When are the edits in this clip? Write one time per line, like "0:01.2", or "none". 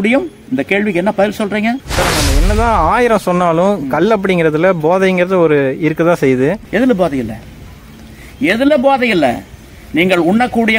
0:06.6